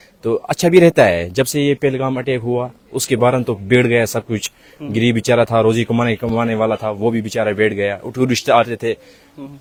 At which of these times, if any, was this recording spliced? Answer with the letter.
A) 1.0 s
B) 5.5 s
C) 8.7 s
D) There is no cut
D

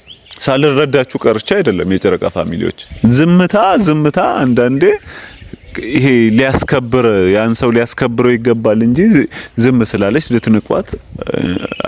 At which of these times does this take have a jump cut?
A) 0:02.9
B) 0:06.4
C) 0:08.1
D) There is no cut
A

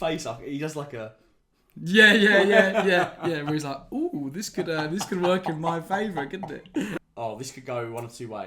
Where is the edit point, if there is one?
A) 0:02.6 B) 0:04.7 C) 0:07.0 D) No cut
C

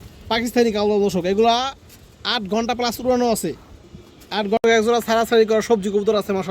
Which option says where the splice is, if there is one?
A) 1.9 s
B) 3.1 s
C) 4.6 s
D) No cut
C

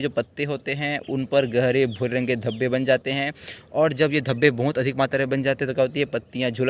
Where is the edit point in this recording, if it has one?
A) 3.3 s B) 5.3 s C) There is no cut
C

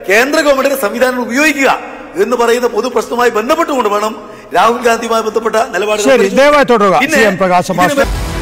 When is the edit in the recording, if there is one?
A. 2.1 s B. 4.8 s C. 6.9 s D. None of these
D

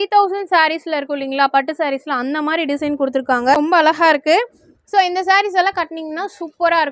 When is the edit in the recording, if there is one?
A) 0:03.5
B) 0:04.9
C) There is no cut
A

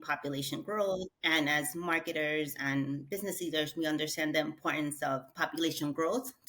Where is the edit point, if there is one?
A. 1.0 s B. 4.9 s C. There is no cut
A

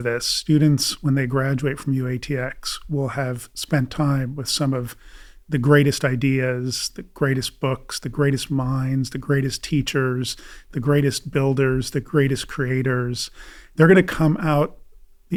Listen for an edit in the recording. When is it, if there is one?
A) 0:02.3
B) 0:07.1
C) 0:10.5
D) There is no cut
D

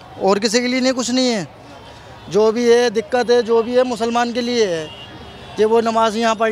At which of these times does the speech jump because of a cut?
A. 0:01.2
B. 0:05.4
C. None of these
C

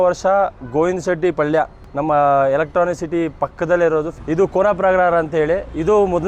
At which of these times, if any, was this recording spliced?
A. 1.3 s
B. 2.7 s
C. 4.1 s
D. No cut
C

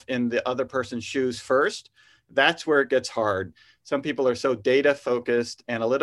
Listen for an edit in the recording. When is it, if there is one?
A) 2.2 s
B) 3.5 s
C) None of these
B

